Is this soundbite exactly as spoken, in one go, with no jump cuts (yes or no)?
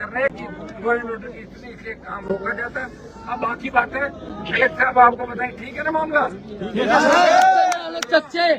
yes